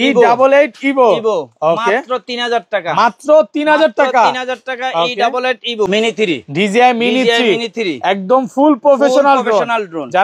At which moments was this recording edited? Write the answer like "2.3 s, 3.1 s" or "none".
5.9 s